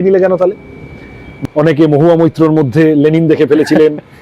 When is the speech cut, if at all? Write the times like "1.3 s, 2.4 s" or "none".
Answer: 1.3 s